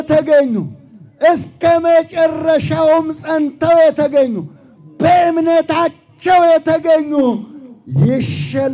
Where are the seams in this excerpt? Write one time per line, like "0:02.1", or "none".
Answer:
none